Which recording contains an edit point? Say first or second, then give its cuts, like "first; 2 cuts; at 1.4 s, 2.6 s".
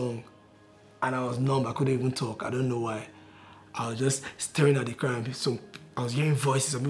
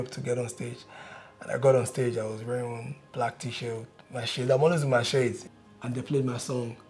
second; 1 cut; at 5.4 s